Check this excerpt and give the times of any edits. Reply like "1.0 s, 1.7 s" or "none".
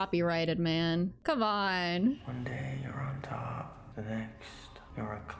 2.3 s